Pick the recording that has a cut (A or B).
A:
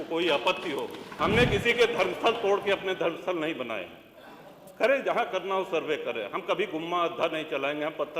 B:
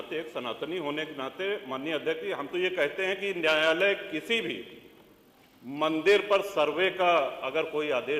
A